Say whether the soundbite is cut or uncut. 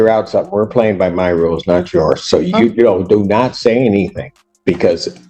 uncut